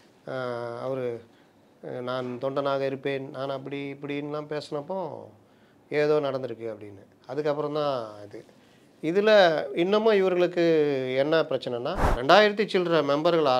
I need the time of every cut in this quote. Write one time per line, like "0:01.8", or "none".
0:12.1